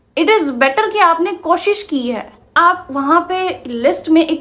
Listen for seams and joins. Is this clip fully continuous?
no; 1 cut; at 2.5 s

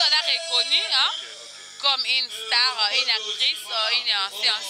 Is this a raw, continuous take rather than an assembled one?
yes; 0 cuts

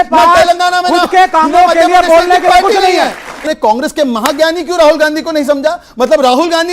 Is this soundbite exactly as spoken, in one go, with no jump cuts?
no; 1 cut; at 3.4 s

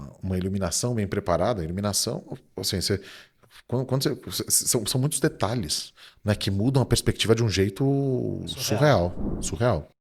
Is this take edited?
no; 0 cuts

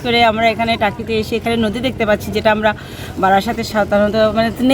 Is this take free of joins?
yes; 0 cuts

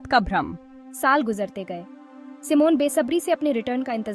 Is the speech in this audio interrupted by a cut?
no; 0 cuts

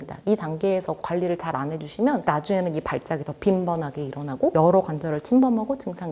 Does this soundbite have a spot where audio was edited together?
no; 0 cuts

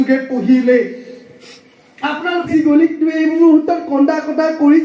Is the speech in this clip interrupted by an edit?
yes; 1 cut; at 2.5 s

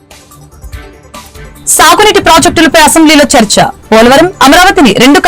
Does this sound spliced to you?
yes; 1 cut; at 1.2 s

